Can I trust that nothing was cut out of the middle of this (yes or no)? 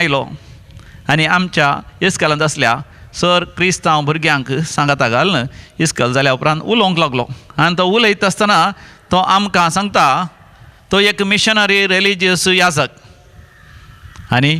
yes